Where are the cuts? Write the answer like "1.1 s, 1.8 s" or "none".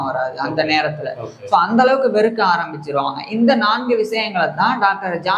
none